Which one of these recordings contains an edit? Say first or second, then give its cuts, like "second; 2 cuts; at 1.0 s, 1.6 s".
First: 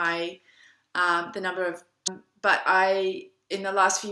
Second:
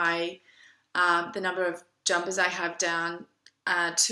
second; 1 cut; at 2.1 s